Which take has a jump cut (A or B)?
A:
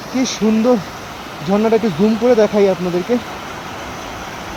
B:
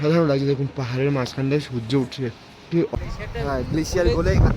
B